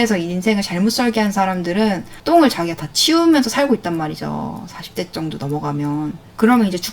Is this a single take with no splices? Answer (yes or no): no